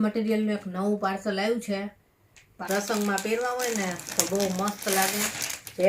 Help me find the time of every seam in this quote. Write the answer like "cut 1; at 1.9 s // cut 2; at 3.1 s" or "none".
cut 1; at 2.6 s